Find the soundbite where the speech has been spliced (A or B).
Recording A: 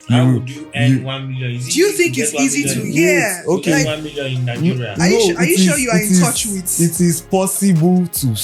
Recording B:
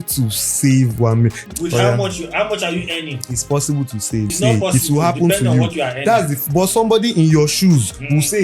B